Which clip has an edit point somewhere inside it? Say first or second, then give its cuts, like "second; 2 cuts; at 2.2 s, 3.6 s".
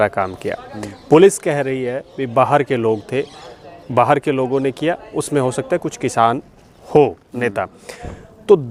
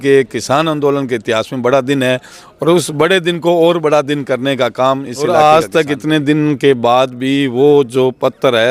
second; 1 cut; at 5.3 s